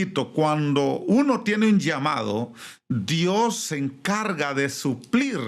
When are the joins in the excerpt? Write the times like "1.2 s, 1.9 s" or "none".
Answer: none